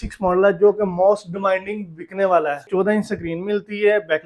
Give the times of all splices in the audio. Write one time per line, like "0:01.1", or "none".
0:02.6